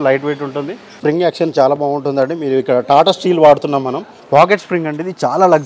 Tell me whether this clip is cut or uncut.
cut